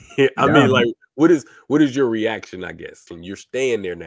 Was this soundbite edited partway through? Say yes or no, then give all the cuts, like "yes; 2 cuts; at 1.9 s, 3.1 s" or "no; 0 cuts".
yes; 1 cut; at 3.1 s